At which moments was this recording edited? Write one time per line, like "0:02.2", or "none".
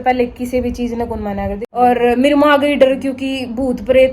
0:01.6